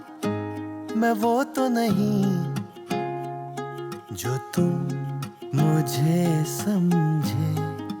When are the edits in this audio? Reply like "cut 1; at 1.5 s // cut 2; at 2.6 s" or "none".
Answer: none